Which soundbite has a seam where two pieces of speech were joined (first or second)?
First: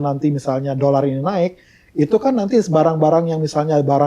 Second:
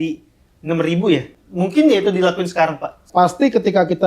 second